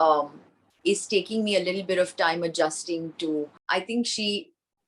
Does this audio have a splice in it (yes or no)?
yes